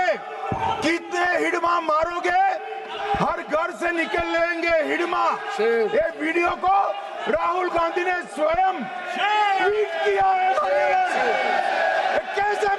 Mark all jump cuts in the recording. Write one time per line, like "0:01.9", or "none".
none